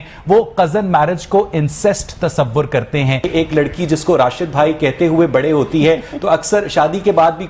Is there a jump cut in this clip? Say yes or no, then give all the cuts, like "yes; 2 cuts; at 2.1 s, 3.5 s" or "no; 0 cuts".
yes; 1 cut; at 3.2 s